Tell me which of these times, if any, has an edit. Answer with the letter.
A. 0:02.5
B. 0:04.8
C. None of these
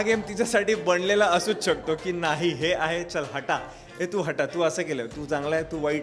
C